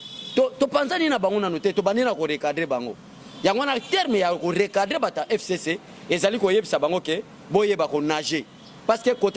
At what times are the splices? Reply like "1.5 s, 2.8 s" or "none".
none